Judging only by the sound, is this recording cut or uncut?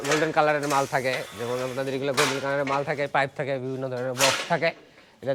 uncut